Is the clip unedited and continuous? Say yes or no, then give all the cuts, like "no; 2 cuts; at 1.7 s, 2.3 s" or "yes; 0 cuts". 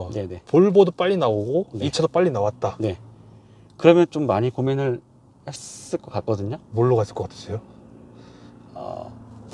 yes; 0 cuts